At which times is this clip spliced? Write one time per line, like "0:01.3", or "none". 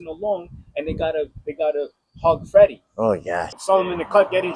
0:03.6